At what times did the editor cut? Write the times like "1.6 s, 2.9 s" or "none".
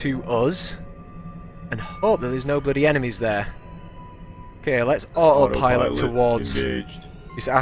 5.6 s